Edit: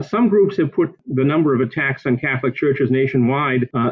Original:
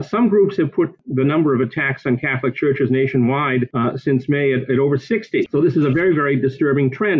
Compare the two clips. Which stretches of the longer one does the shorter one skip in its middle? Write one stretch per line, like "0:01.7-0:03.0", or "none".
none

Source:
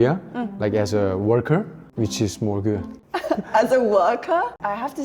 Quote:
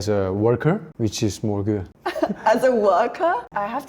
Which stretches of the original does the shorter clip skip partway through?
0:01.7-0:01.9
0:02.9-0:03.0

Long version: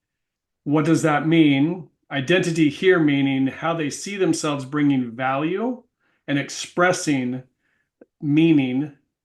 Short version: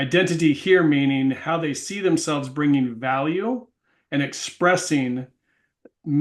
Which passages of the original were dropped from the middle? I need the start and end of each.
none

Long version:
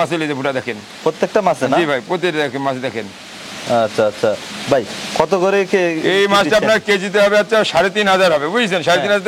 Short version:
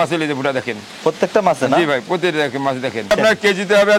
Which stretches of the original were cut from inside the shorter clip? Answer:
0:03.1-0:06.5

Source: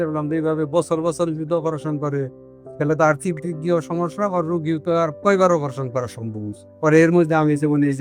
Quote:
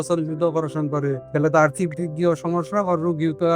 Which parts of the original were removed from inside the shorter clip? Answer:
0:02.3-0:02.7

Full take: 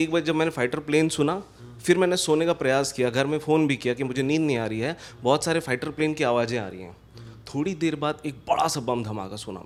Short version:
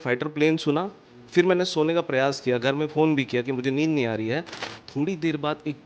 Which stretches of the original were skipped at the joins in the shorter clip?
0:05.1-0:07.1

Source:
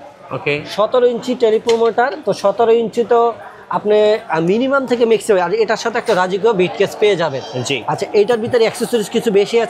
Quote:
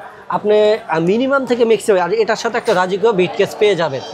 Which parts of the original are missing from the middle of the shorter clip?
none

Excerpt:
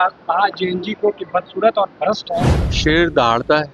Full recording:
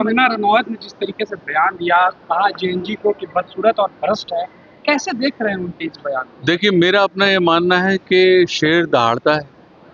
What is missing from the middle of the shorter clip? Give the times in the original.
0:04.8-0:08.5

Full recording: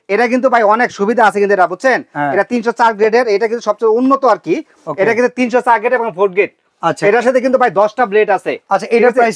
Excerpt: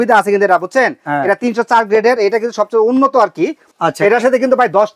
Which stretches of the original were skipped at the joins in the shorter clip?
0:04.7-0:06.7

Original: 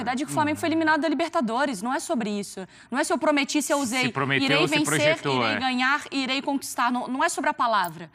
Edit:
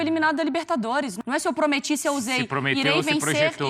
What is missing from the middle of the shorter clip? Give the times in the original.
0:01.8-0:02.8

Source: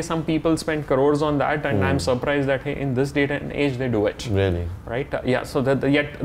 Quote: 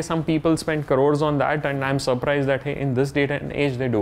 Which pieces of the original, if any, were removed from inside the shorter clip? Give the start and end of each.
none

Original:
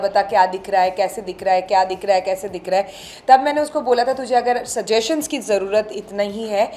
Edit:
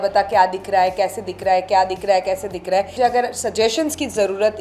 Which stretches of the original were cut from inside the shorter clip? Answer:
0:02.9-0:04.2

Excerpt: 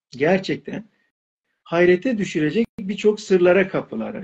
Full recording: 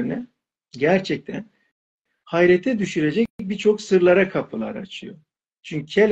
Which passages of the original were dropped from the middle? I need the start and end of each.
none

